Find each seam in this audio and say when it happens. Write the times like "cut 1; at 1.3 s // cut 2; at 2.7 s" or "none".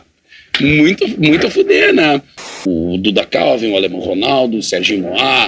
cut 1; at 2.6 s